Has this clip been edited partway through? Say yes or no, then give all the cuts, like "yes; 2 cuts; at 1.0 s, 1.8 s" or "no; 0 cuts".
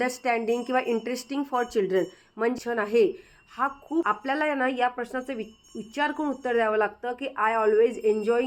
yes; 2 cuts; at 2.5 s, 4.1 s